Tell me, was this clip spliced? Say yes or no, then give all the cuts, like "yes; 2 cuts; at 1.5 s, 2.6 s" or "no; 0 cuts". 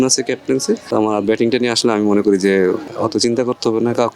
yes; 2 cuts; at 0.8 s, 2.9 s